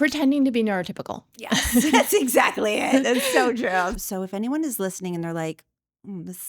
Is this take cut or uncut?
cut